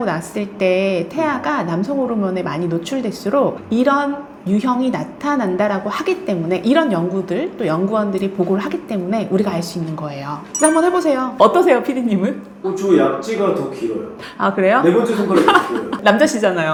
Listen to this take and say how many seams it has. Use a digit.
0